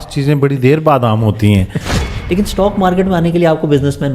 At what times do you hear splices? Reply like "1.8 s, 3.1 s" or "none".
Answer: 2.0 s